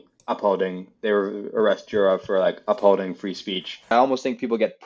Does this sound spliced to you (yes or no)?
yes